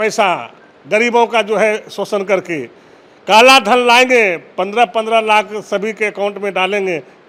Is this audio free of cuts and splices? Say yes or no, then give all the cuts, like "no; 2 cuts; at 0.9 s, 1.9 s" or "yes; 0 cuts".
yes; 0 cuts